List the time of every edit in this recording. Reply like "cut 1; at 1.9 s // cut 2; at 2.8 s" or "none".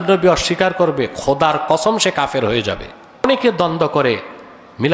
cut 1; at 3.2 s